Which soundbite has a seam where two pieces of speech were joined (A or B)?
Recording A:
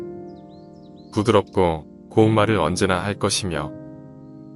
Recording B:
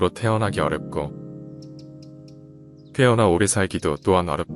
A